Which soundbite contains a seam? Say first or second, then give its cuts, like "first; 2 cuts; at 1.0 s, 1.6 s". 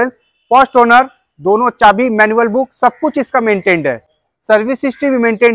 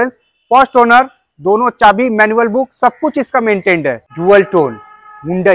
second; 1 cut; at 4.1 s